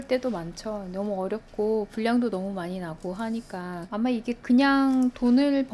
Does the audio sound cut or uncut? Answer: uncut